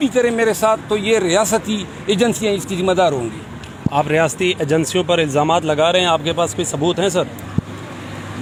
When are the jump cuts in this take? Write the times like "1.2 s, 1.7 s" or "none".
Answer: none